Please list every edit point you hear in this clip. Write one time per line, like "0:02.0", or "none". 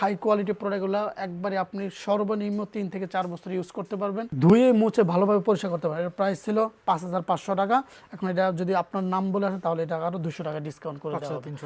none